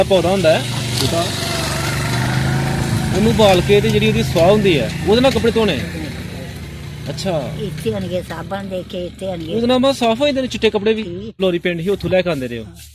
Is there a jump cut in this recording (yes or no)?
yes